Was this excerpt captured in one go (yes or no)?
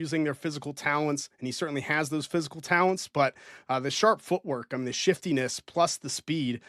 yes